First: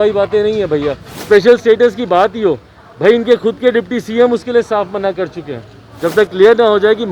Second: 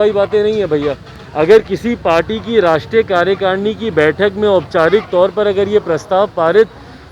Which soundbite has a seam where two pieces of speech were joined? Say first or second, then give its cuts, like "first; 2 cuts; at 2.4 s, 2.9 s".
first; 2 cuts; at 1.1 s, 5.9 s